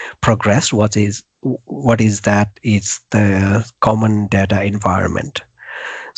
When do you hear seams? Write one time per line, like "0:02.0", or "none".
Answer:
none